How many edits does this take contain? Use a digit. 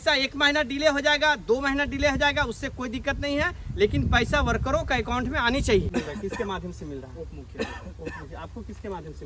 1